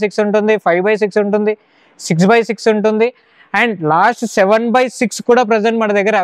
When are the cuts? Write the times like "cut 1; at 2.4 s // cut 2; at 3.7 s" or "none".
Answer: none